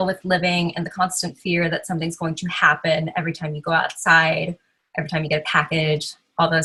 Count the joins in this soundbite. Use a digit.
0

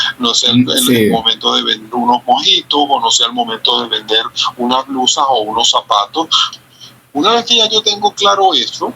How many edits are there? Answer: 1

